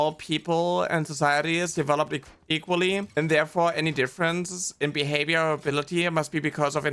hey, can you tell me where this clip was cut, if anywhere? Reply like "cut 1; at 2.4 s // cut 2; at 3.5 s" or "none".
none